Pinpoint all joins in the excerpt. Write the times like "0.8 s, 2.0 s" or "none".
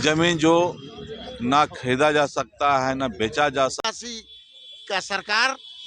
3.8 s